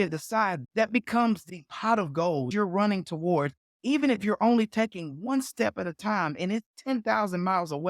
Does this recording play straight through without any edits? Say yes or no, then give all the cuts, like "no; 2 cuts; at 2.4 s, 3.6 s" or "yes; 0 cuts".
no; 1 cut; at 2.5 s